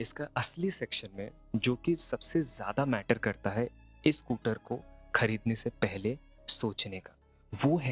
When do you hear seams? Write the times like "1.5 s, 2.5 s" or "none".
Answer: none